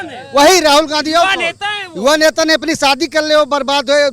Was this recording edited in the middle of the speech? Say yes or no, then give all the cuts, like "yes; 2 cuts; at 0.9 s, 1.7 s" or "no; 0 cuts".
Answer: no; 0 cuts